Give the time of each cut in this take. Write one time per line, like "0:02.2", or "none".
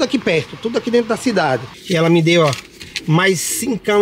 0:01.7